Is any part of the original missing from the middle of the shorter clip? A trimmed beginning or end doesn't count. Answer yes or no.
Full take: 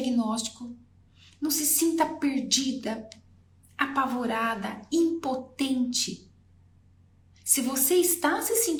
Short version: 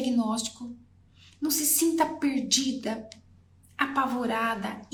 no